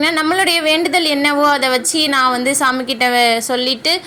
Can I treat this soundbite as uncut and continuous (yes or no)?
yes